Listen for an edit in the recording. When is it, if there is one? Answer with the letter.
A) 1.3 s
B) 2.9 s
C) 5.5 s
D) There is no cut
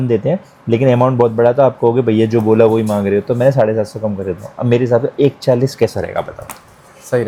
D